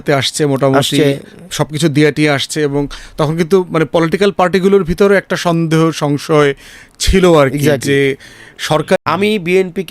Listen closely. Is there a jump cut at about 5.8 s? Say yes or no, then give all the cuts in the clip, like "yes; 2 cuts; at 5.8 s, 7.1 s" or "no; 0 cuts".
no; 1 cut; at 9.0 s